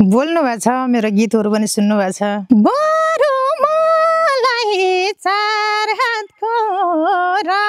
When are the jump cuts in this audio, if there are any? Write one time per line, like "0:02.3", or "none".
0:02.4

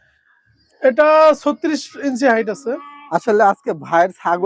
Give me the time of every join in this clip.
none

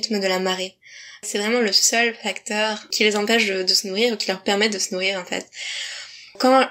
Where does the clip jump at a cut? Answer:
0:01.2

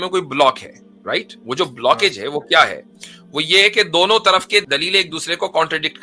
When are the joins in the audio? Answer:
0:04.6

